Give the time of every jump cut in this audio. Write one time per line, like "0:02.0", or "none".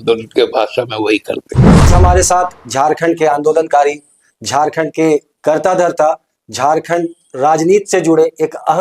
0:01.9